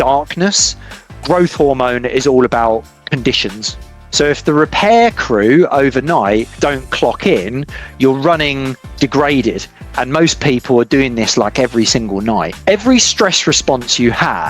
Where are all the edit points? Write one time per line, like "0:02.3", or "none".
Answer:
0:04.0
0:12.5